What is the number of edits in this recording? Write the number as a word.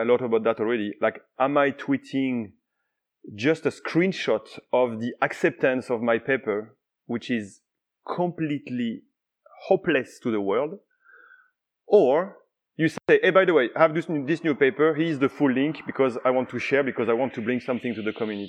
zero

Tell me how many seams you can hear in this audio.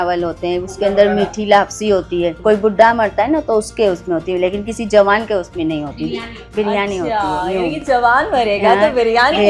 one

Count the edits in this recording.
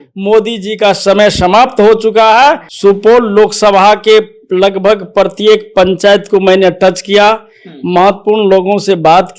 one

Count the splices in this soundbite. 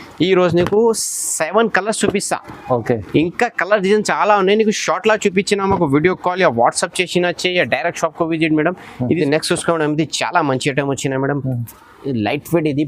one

